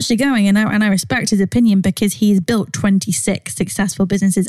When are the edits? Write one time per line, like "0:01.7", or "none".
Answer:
none